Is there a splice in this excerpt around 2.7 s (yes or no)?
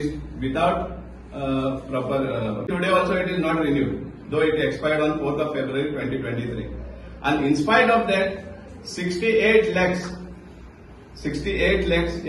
yes